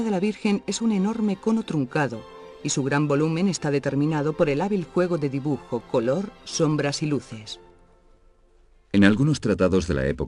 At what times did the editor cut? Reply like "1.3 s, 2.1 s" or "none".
none